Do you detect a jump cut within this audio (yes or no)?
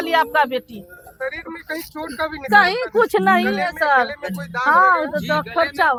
no